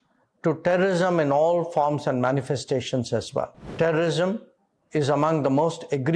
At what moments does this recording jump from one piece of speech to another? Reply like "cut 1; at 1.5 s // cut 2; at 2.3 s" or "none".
cut 1; at 3.6 s